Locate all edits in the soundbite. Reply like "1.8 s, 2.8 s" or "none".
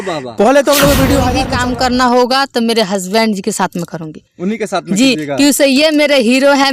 1.4 s